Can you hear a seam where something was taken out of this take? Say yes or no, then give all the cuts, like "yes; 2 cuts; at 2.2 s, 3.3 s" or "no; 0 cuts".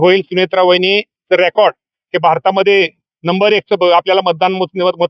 no; 0 cuts